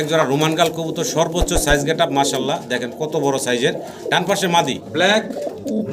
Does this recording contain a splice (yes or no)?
yes